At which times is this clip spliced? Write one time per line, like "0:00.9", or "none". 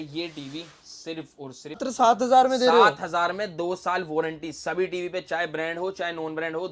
0:01.8

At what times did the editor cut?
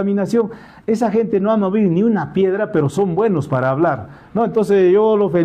none

